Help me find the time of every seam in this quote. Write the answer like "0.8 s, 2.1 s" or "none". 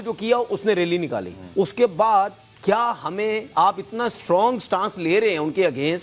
1.4 s